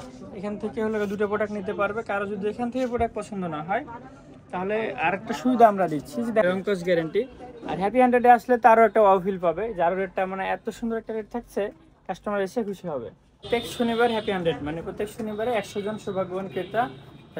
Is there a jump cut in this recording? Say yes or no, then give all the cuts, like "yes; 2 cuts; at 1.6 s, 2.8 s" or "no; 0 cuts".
yes; 2 cuts; at 6.4 s, 13.4 s